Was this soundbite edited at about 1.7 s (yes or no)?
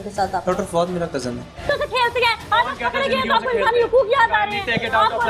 yes